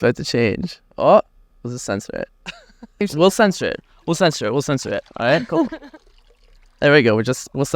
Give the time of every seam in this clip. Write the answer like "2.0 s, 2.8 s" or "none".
3.0 s